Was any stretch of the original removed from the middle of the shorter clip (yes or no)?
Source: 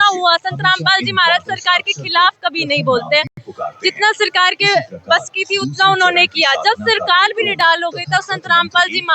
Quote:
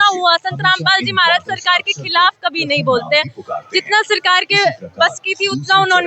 yes